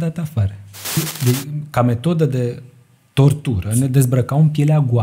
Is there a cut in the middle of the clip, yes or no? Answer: yes